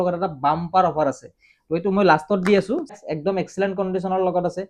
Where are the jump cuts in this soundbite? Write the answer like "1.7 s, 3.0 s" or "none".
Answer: 3.0 s